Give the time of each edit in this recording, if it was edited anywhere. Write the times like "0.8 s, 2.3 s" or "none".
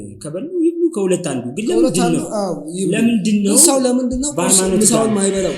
none